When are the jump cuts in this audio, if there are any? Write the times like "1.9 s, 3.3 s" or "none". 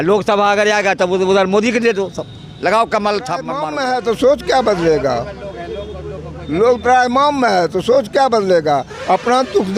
3.7 s